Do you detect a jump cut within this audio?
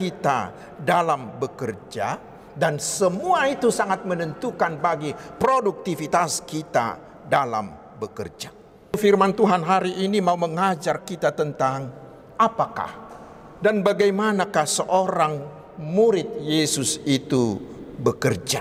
yes; 1 cut; at 8.9 s

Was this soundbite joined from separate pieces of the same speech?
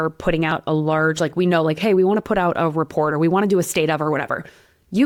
no; 0 cuts

